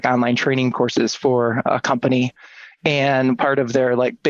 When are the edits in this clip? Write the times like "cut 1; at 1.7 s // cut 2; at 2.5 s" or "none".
cut 1; at 1.7 s